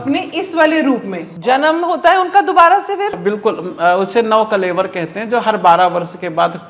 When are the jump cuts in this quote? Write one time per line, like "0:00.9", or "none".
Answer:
0:01.5